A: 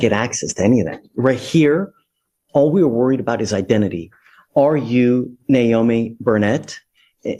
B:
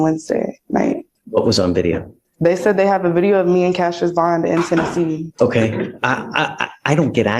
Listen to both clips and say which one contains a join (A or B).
B